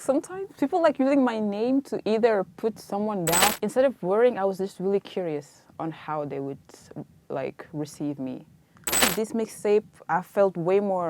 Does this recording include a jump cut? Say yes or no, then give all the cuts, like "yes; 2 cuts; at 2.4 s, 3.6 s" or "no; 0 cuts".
yes; 2 cuts; at 3.6 s, 9.1 s